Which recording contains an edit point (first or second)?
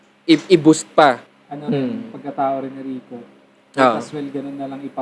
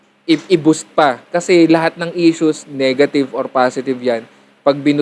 first